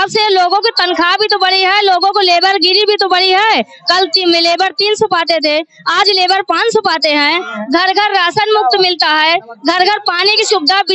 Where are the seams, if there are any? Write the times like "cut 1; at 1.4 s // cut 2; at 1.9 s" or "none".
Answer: none